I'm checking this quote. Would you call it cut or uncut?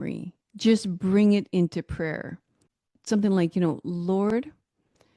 cut